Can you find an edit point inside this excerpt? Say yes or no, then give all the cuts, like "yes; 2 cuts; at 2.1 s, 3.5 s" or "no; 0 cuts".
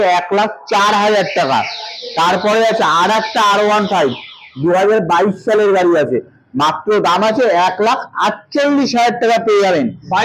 no; 0 cuts